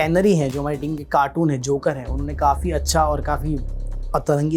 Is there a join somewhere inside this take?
no; 0 cuts

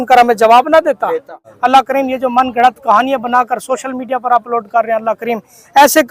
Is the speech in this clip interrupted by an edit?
yes; 1 cut; at 1.4 s

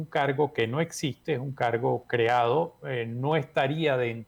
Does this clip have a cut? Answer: no; 0 cuts

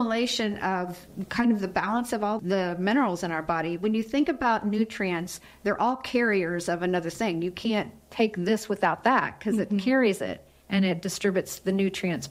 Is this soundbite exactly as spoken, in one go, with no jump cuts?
no; 1 cut; at 2.4 s

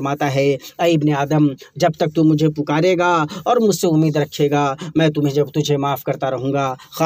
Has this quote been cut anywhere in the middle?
no; 0 cuts

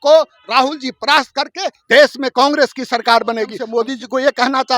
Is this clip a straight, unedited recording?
no; 1 cut; at 3.6 s

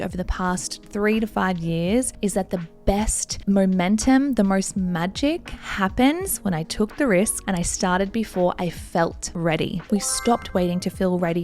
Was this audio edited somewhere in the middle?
yes; 2 cuts; at 2.1 s, 9.9 s

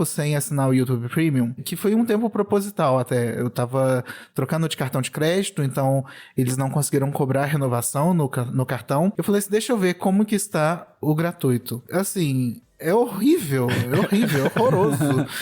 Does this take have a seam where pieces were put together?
yes; 1 cut; at 1.6 s

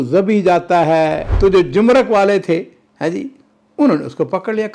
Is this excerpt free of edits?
no; 1 cut; at 1.2 s

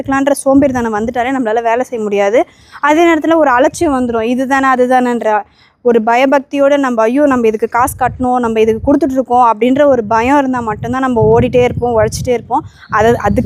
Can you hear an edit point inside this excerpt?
no; 0 cuts

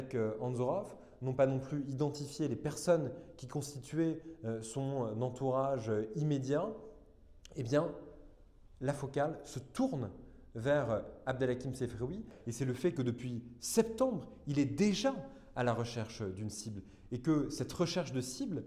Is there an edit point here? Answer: yes; 1 cut; at 12.4 s

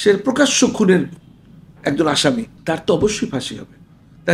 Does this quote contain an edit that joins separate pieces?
yes; 1 cut; at 2.5 s

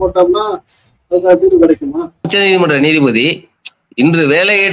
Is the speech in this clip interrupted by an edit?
yes; 1 cut; at 2.3 s

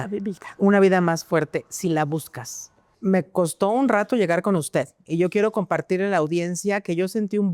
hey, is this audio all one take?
no; 1 cut; at 2.9 s

